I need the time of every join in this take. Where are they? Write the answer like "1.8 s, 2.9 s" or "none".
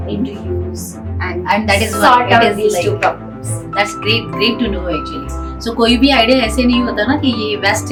none